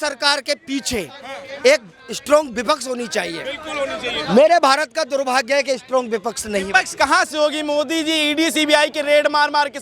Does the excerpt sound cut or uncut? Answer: uncut